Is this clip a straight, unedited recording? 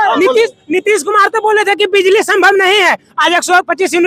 yes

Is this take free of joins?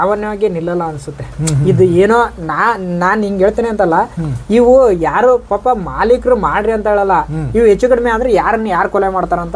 yes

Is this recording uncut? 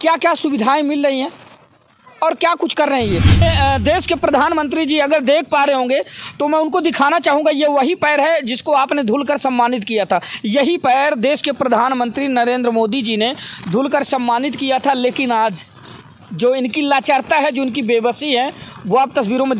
no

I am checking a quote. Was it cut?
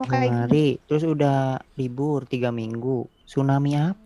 yes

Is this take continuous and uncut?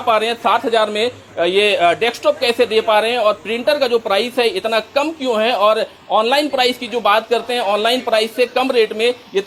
yes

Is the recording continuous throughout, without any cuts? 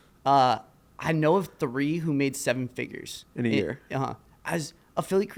yes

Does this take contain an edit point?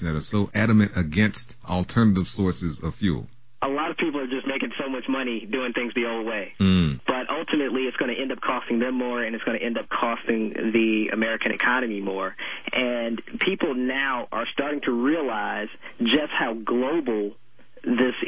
no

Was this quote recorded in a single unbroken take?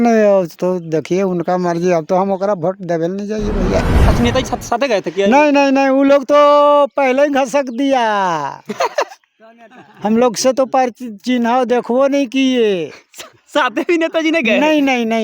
no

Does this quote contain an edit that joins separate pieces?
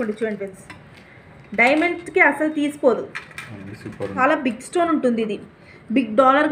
yes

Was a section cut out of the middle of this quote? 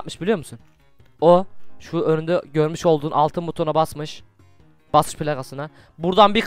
no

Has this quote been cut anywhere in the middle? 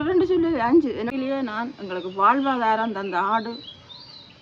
yes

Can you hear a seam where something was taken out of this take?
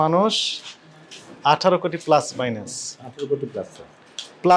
no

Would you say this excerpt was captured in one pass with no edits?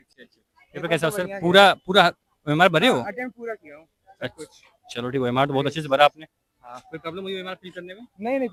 yes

